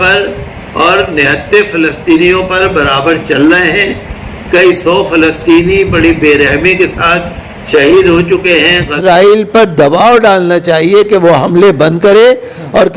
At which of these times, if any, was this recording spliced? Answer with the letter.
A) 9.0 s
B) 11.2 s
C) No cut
A